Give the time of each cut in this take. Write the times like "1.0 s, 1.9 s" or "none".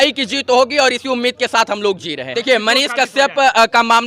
2.3 s